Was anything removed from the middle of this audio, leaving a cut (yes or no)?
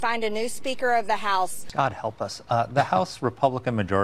yes